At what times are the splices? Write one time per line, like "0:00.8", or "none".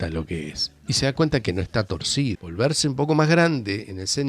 0:02.4